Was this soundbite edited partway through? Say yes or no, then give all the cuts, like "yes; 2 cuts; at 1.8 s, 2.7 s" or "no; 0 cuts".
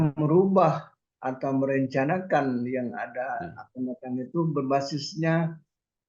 no; 0 cuts